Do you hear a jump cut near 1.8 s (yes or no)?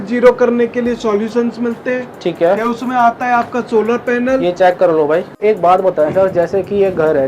no